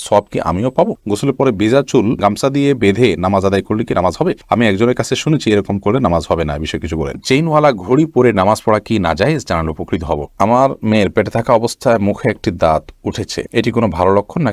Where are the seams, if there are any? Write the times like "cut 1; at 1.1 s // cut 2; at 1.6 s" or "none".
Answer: cut 1; at 1.1 s // cut 2; at 7.2 s // cut 3; at 10.3 s